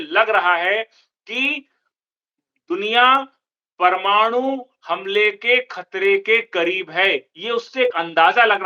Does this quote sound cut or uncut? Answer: uncut